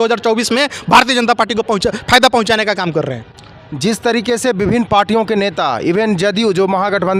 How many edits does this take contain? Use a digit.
0